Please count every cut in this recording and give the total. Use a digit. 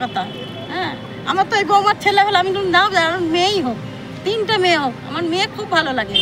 0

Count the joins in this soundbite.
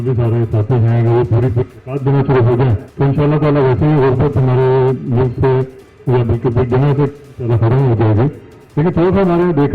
1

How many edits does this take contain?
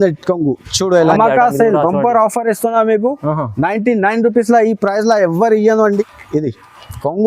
2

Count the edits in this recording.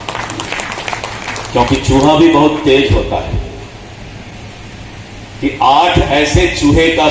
1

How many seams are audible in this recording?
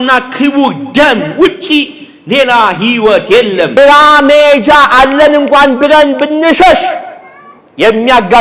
1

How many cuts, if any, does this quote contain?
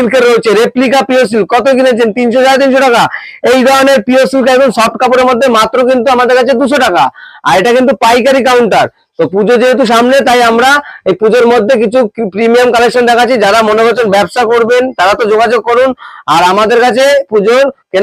0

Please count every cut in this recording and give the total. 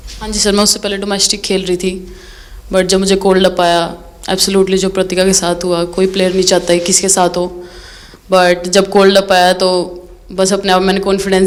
0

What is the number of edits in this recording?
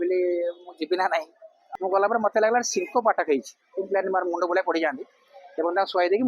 1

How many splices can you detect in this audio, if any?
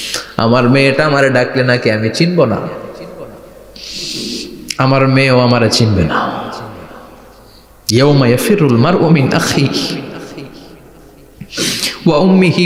0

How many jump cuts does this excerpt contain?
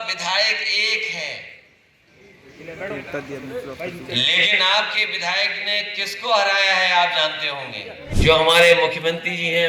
1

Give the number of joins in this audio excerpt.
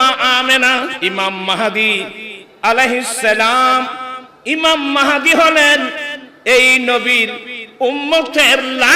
1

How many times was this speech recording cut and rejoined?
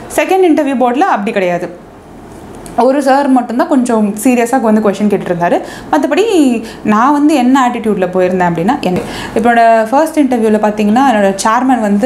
1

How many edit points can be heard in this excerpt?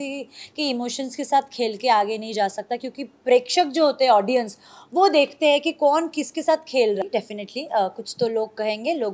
1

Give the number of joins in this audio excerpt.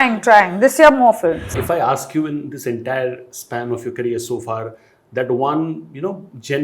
1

